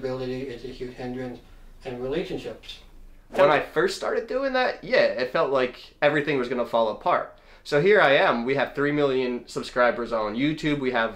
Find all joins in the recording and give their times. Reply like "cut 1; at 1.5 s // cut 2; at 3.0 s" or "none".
cut 1; at 3.4 s